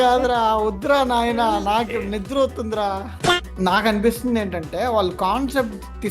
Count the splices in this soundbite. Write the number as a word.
one